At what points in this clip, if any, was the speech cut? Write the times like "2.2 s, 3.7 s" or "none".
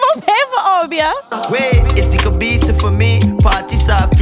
1.4 s